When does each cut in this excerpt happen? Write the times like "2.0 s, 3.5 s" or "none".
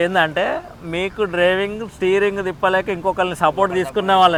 none

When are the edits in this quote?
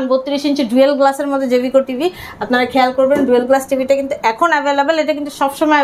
none

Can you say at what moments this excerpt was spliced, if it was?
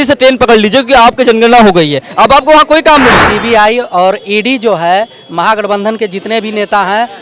3.3 s

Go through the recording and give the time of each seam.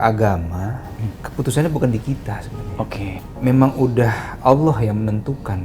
3.2 s

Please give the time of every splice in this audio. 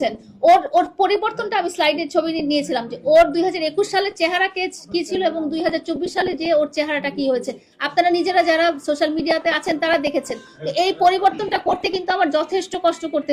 none

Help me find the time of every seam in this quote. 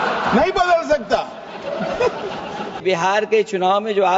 2.8 s

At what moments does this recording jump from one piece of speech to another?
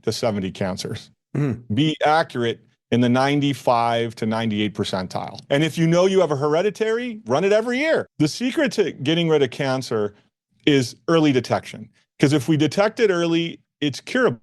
5.4 s, 8.1 s

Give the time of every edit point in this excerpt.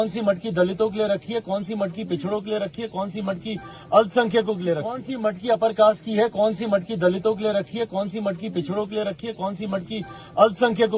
5.1 s

